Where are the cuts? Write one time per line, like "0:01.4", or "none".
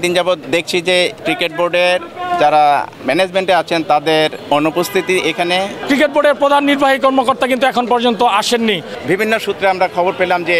0:00.9
0:02.9
0:04.4
0:05.8
0:08.9